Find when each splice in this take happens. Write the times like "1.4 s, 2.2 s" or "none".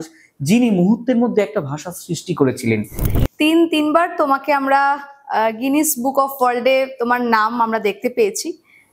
3.0 s